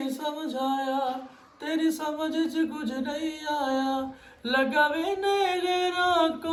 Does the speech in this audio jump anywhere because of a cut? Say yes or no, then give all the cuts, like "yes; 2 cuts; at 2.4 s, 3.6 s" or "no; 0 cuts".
no; 0 cuts